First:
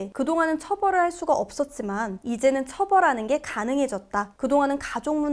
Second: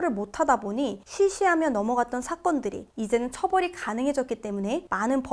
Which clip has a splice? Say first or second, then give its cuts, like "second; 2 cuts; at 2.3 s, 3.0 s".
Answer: first; 1 cut; at 4.3 s